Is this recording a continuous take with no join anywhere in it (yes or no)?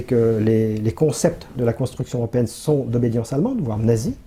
yes